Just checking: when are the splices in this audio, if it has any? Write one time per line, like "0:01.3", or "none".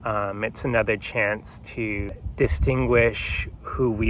0:02.1